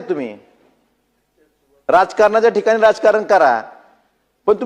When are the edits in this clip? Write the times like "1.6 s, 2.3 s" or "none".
none